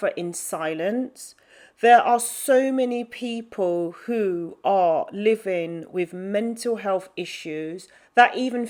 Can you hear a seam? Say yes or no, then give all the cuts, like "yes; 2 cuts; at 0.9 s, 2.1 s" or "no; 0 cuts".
no; 0 cuts